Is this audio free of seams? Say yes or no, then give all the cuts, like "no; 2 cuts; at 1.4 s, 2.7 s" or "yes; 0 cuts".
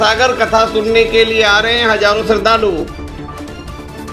no; 1 cut; at 2.9 s